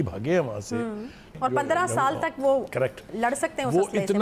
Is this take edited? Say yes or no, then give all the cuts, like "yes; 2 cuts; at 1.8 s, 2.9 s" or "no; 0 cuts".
yes; 1 cut; at 1.3 s